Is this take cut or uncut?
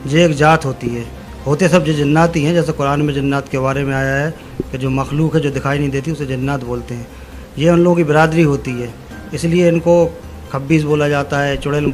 uncut